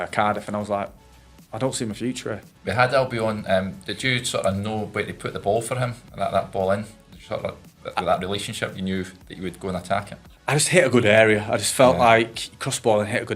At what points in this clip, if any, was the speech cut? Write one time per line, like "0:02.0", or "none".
0:02.5